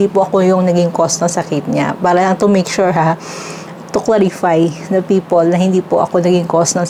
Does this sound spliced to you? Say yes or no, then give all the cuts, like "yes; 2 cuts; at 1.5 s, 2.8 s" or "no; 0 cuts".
no; 0 cuts